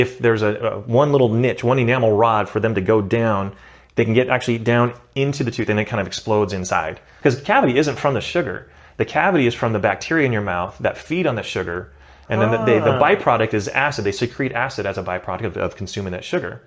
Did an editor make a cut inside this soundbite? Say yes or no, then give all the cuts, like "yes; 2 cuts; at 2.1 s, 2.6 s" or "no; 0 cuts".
yes; 1 cut; at 7.0 s